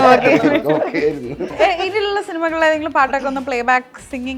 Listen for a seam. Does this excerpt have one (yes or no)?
yes